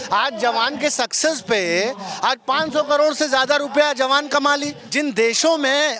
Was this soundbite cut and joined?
yes; 1 cut; at 4.8 s

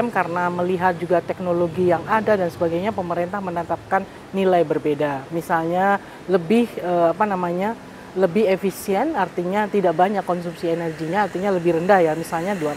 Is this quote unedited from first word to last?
yes; 0 cuts

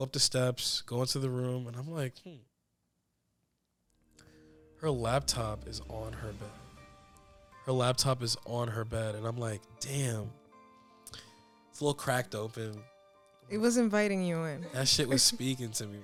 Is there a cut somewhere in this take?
no; 0 cuts

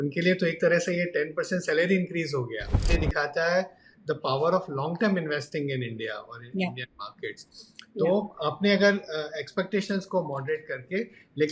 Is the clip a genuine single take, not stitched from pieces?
no; 1 cut; at 2.8 s

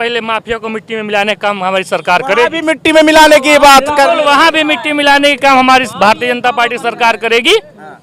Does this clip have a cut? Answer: no; 0 cuts

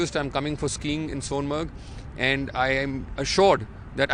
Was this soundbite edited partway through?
no; 0 cuts

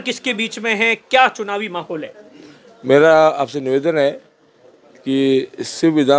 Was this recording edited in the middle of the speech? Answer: no; 0 cuts

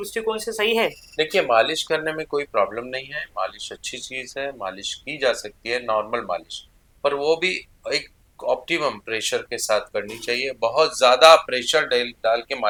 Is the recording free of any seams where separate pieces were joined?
yes; 0 cuts

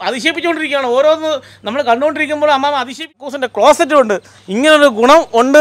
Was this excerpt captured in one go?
no; 1 cut; at 3.3 s

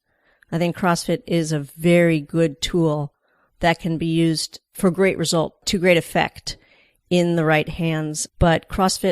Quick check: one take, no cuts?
no; 3 cuts; at 4.7 s, 5.6 s, 8.2 s

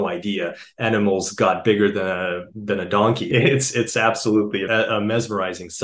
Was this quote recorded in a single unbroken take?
no; 2 cuts; at 3.2 s, 4.6 s

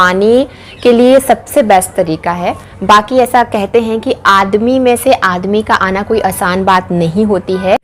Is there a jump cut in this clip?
no; 0 cuts

